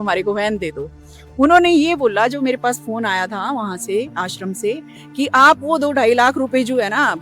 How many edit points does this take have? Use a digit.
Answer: 0